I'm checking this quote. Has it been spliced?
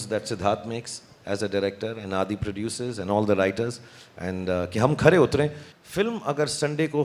yes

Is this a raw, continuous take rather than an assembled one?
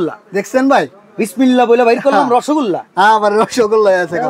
yes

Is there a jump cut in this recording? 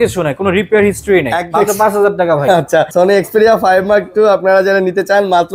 yes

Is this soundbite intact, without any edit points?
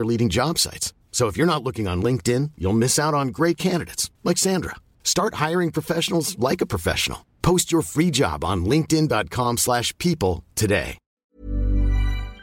no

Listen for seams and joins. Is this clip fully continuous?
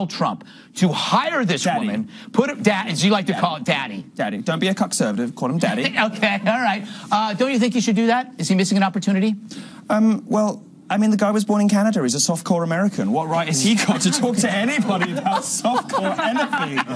yes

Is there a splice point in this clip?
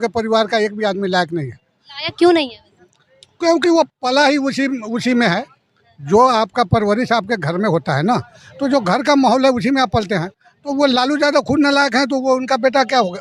no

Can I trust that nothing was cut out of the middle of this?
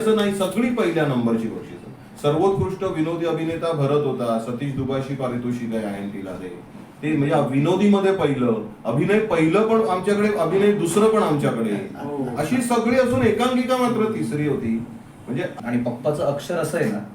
no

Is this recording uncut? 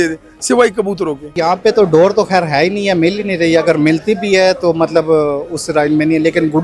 no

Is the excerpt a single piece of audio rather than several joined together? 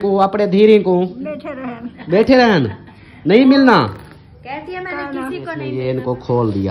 no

